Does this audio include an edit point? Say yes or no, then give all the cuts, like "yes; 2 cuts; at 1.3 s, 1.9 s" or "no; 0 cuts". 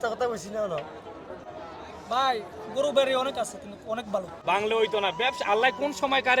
yes; 2 cuts; at 1.4 s, 4.3 s